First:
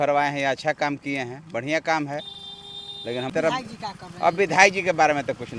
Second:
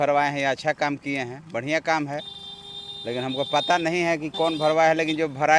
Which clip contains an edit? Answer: first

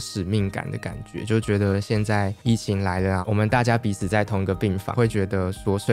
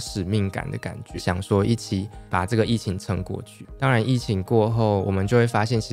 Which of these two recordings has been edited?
second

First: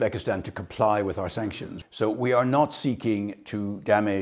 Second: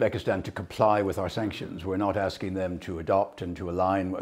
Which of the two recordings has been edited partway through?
first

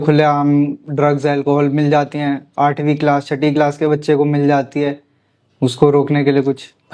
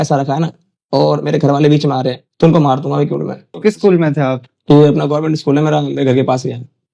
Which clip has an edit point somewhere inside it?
second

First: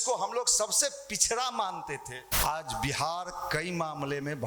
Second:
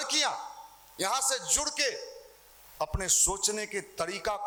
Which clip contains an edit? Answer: first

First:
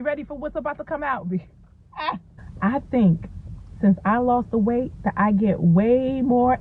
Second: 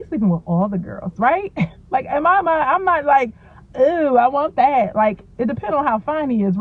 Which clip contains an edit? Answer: first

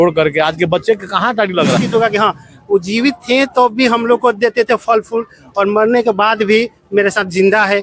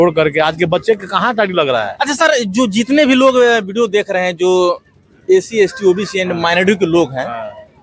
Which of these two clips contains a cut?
first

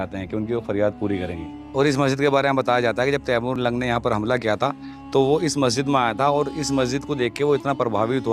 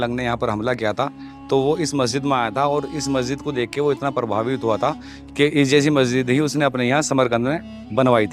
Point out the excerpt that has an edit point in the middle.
first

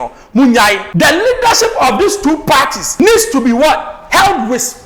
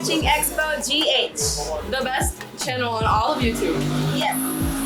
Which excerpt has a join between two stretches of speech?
first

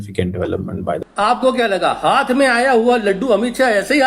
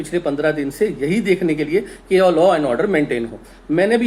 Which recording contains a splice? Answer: first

